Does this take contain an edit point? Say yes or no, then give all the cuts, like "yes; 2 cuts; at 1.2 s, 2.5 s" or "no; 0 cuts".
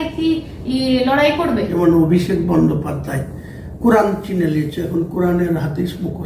yes; 1 cut; at 1.7 s